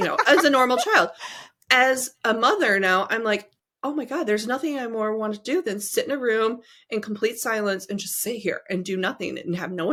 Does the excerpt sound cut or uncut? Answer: uncut